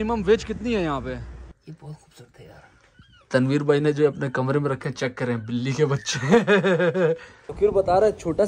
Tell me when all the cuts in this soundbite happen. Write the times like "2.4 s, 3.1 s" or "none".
1.4 s, 7.5 s